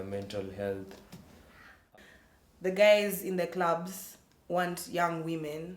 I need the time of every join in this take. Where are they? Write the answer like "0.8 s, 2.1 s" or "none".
1.9 s